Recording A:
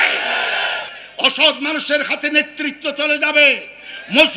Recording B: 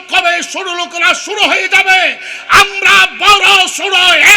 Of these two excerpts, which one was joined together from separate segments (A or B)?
A